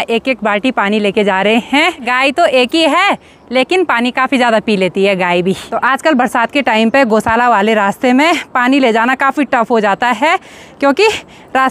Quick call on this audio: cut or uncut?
uncut